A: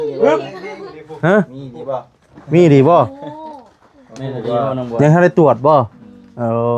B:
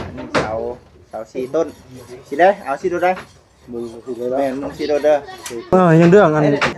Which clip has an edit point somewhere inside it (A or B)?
B